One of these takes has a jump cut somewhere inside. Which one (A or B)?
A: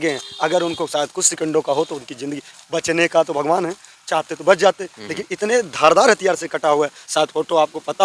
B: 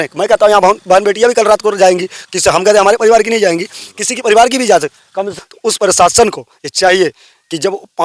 B